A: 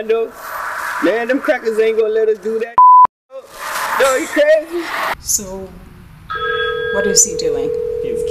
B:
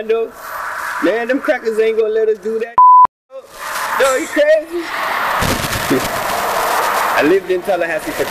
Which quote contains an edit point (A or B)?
A